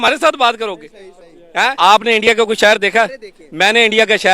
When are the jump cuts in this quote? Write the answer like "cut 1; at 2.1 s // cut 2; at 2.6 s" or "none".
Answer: cut 1; at 1.7 s